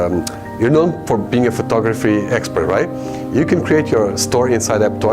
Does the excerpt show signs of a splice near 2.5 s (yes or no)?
no